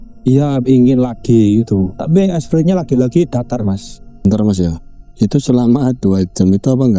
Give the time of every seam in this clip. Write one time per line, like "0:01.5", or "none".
0:04.2